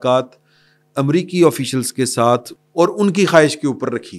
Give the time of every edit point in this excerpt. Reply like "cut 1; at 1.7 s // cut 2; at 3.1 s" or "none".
cut 1; at 2.6 s

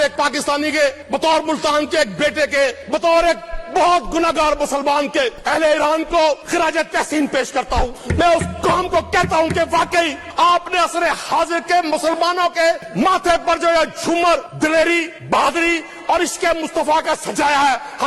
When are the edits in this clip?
cut 1; at 1.0 s // cut 2; at 2.8 s // cut 3; at 5.4 s // cut 4; at 6.4 s // cut 5; at 8.0 s // cut 6; at 10.2 s // cut 7; at 12.9 s // cut 8; at 14.5 s // cut 9; at 15.1 s

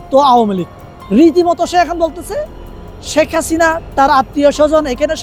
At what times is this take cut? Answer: none

